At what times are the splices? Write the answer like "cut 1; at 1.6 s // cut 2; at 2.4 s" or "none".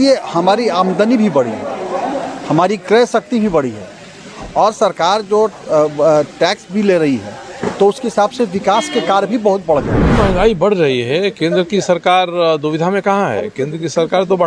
cut 1; at 10.0 s